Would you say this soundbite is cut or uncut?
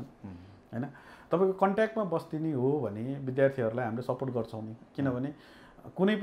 uncut